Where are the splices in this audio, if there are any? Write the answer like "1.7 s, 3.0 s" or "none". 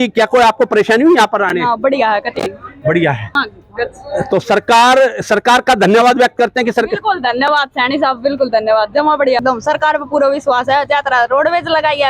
3.3 s, 9.4 s